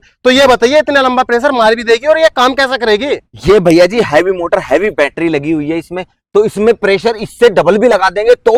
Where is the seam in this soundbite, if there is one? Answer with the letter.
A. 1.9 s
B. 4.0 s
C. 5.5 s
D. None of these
D